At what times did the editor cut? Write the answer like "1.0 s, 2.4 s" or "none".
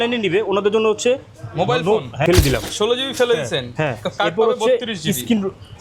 2.2 s